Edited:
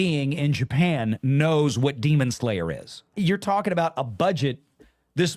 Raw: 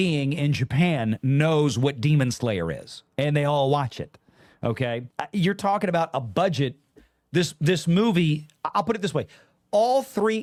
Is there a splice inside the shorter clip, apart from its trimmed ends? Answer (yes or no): yes